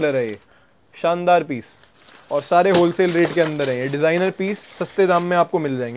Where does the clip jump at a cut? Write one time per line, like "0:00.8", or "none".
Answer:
none